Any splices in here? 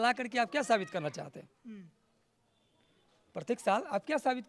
no; 0 cuts

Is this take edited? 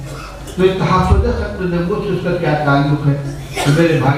no; 0 cuts

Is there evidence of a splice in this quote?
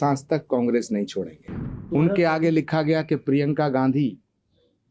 yes; 1 cut; at 1.9 s

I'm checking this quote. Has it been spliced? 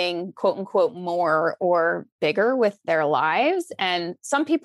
no; 0 cuts

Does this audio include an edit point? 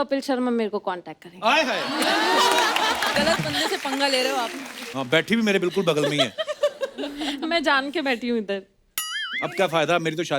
yes; 1 cut; at 3.1 s

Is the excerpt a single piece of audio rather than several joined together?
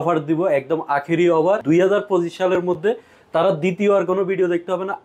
no; 1 cut; at 1.6 s

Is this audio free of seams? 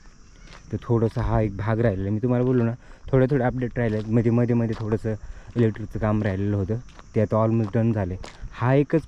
yes; 0 cuts

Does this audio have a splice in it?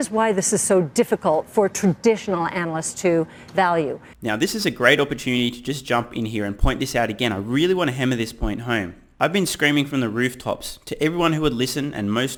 no; 0 cuts

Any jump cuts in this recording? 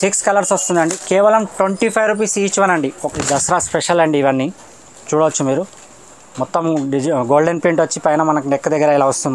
yes; 1 cut; at 3.0 s

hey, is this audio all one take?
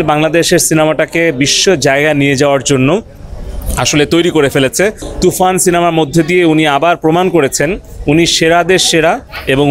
no; 1 cut; at 5.1 s

